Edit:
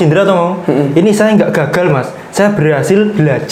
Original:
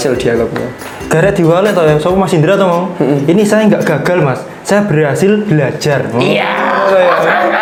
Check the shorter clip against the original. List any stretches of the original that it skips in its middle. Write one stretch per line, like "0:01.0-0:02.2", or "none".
none